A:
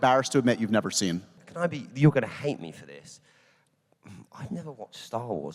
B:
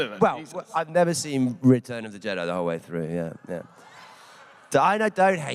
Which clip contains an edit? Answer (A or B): A